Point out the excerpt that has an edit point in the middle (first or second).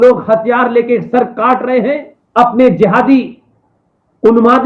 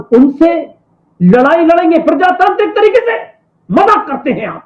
first